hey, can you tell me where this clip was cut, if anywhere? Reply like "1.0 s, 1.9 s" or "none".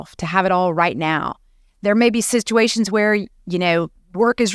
none